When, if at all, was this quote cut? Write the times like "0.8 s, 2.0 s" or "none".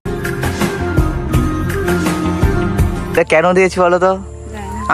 3.2 s